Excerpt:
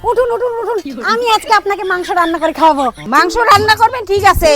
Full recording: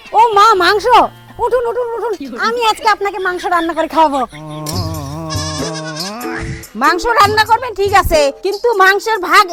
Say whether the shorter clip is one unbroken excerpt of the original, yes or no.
no